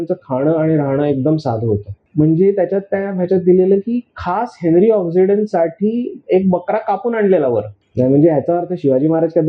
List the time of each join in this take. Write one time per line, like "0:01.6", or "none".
0:02.0
0:07.8